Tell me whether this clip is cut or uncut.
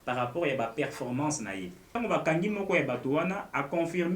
cut